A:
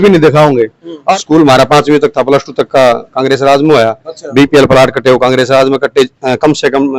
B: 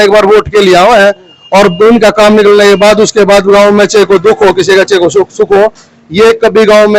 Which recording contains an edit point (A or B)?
A